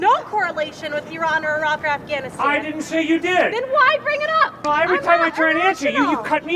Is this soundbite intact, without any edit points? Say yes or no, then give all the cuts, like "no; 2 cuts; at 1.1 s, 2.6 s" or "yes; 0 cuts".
no; 1 cut; at 4.6 s